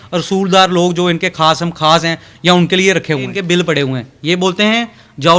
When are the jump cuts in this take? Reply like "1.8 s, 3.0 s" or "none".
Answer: 3.4 s